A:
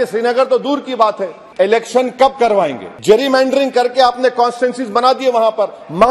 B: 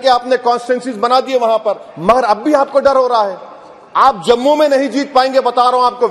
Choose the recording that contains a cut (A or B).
A